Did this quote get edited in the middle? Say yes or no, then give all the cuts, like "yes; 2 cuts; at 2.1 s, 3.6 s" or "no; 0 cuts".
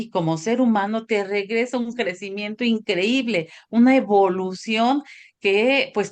no; 0 cuts